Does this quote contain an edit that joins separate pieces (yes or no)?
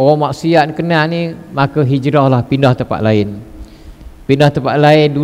no